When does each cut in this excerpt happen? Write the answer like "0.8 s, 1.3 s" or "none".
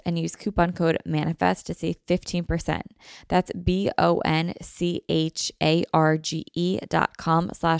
none